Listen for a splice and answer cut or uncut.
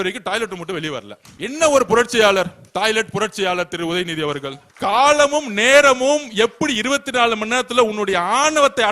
cut